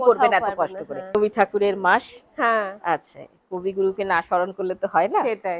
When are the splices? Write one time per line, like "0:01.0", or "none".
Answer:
0:01.2